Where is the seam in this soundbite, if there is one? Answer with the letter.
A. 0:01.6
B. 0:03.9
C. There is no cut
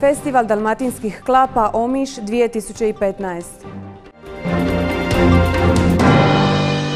C